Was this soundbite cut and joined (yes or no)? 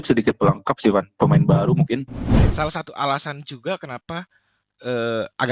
yes